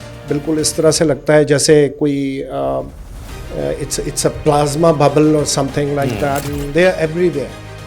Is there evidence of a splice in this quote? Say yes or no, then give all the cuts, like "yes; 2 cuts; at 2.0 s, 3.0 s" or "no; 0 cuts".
yes; 1 cut; at 6.4 s